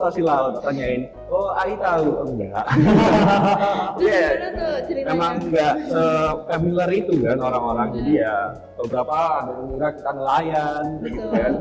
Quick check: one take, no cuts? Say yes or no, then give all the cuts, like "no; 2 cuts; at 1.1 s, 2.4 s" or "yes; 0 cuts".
yes; 0 cuts